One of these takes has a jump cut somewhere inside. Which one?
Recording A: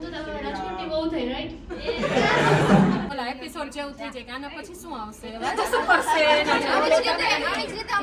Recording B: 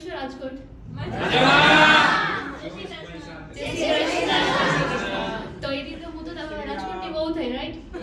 A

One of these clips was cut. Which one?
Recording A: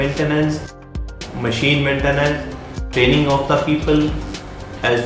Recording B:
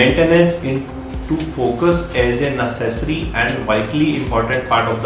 A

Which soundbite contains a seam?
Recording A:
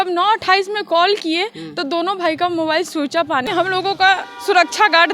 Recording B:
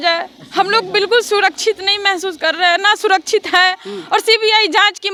A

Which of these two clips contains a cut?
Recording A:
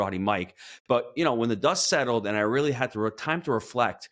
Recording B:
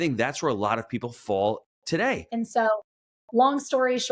B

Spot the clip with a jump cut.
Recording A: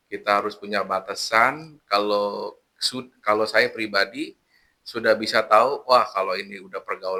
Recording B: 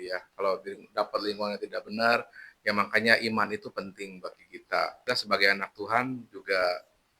B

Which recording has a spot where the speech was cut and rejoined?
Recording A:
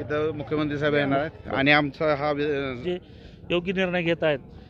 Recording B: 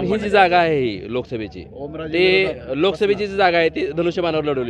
A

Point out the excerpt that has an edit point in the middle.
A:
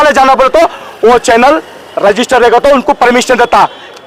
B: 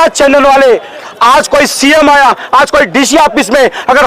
B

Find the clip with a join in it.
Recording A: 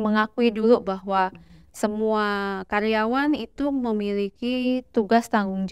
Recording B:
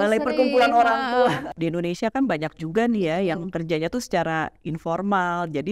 B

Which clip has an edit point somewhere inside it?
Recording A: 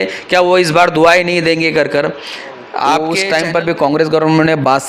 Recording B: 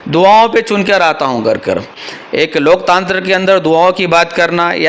A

